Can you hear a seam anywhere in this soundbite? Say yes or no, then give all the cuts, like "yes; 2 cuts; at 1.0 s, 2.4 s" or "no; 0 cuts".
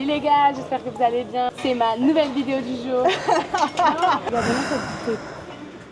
no; 0 cuts